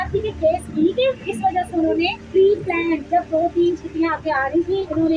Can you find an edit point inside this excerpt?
yes; 1 cut; at 2.2 s

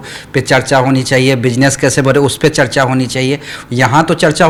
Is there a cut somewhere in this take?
no; 0 cuts

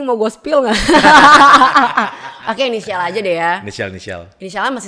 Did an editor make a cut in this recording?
no; 0 cuts

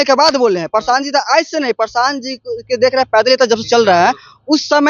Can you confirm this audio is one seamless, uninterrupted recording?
yes; 0 cuts

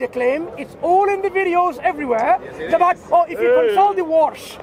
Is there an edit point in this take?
no; 0 cuts

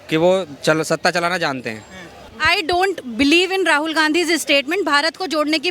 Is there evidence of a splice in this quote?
yes; 1 cut; at 2.2 s

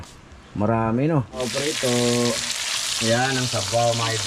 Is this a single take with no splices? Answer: no; 1 cut; at 1.4 s

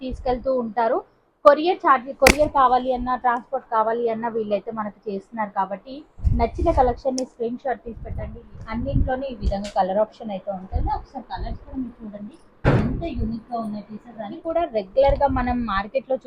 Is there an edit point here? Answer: yes; 2 cuts; at 8.3 s, 14.4 s

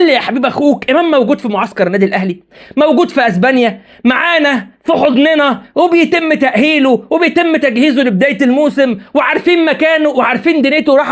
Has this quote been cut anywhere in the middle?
no; 0 cuts

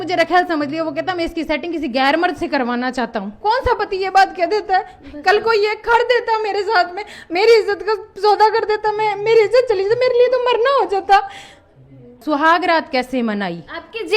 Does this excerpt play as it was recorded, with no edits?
no; 2 cuts; at 3.3 s, 12.2 s

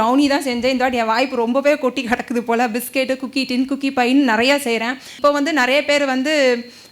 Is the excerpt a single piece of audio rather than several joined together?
no; 1 cut; at 5.2 s

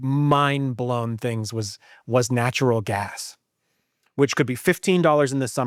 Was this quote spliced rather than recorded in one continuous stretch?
no; 0 cuts

